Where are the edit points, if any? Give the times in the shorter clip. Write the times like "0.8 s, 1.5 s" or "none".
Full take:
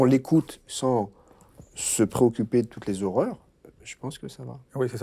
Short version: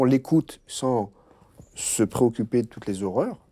none